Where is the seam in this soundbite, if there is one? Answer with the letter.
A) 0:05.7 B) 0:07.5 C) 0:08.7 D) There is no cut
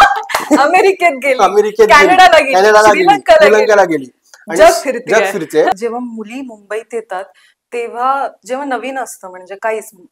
A